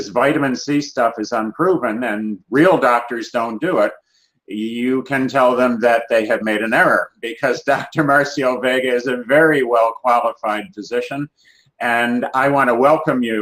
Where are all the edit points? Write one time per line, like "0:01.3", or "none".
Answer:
none